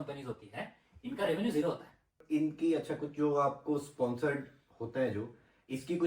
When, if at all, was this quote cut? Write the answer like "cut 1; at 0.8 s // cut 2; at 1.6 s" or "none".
cut 1; at 2.2 s